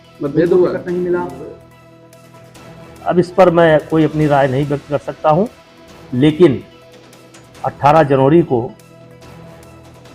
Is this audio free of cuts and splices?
yes; 0 cuts

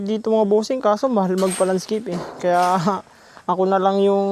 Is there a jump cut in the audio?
no; 0 cuts

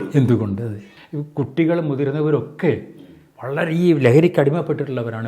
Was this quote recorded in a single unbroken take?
no; 1 cut; at 0.9 s

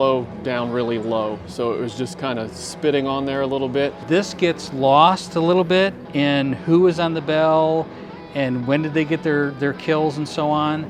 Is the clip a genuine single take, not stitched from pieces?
no; 1 cut; at 4.0 s

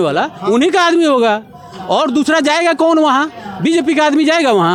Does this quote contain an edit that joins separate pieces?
no; 0 cuts

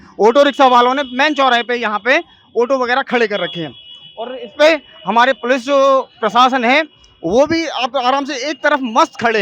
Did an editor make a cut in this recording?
no; 0 cuts

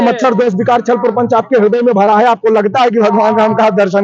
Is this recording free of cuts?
yes; 0 cuts

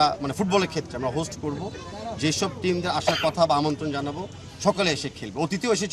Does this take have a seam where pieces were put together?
no; 0 cuts

